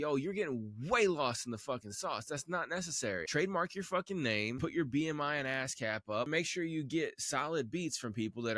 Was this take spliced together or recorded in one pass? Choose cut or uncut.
cut